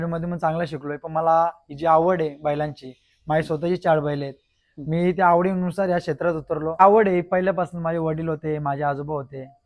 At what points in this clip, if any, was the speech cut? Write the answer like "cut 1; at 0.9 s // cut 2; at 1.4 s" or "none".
cut 1; at 6.8 s